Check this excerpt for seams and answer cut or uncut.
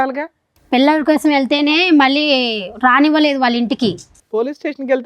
uncut